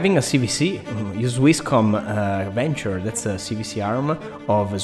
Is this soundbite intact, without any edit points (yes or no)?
yes